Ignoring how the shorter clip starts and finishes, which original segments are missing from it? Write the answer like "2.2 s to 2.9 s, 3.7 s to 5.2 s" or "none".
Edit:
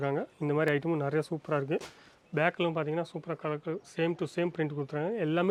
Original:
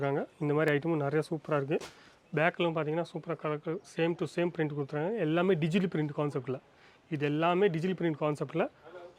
none

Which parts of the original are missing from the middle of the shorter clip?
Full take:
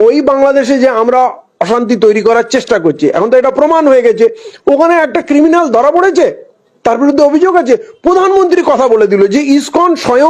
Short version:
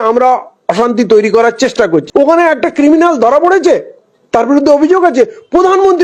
3.0 s to 4.6 s

